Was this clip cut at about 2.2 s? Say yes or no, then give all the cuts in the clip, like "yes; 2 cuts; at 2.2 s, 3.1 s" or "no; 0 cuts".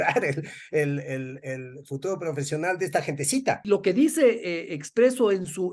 no; 1 cut; at 3.6 s